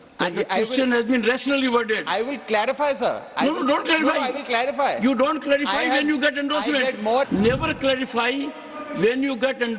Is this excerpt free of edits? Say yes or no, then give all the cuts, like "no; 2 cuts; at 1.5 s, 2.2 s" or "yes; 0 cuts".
no; 1 cut; at 7.2 s